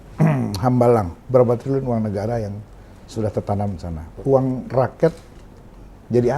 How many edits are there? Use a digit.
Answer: 1